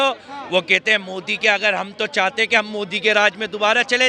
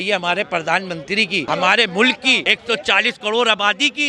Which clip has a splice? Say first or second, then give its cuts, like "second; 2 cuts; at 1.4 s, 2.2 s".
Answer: second; 2 cuts; at 1.4 s, 2.4 s